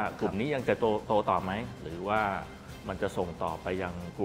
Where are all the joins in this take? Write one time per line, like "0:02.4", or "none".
none